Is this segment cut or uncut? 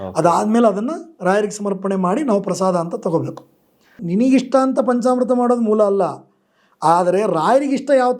cut